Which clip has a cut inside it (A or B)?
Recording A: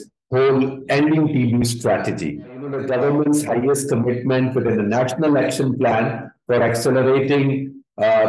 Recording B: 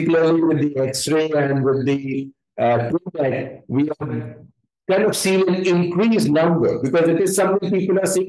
A